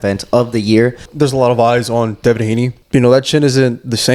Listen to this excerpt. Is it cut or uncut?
cut